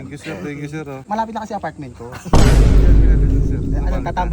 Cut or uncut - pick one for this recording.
cut